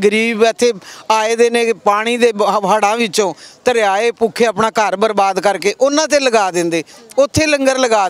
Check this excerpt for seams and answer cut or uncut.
uncut